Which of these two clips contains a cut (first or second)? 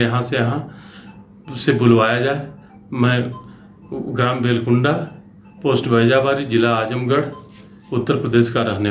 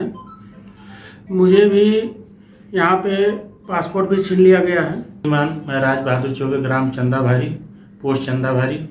second